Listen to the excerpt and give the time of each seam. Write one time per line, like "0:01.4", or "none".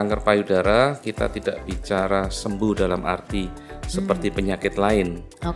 none